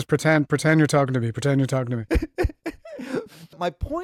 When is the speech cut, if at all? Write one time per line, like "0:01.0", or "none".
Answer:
none